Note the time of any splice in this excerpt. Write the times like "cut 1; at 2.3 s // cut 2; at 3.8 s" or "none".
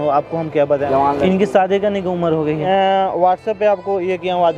cut 1; at 0.8 s // cut 2; at 2.7 s